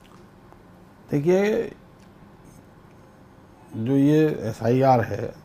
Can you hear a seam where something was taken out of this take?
no; 0 cuts

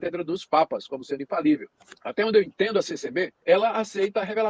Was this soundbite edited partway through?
yes; 2 cuts; at 2.0 s, 3.3 s

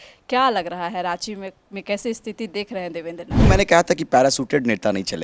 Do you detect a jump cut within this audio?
yes; 1 cut; at 3.4 s

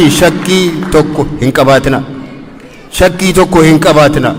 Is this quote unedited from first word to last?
yes; 0 cuts

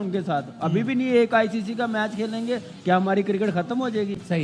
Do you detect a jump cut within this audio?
no; 0 cuts

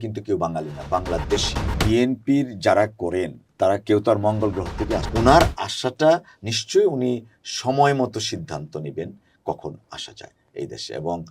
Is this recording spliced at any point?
yes; 2 cuts; at 1.7 s, 5.1 s

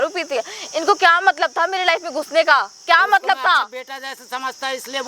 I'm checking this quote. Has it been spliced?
no; 0 cuts

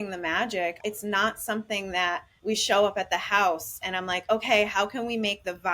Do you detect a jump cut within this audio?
yes; 2 cuts; at 0.8 s, 2.3 s

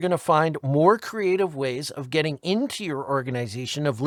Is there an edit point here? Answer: no; 0 cuts

